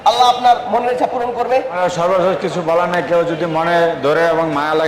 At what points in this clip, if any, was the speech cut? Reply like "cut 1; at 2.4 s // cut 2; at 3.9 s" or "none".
cut 1; at 1.7 s